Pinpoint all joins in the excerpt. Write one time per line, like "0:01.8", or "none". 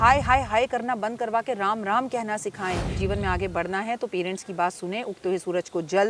0:03.0